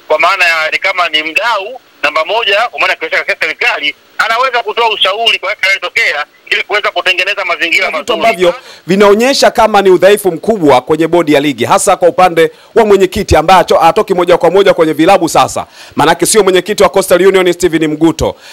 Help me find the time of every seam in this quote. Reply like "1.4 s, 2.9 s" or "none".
8.1 s